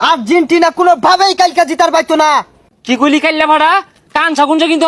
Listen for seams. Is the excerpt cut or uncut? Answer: cut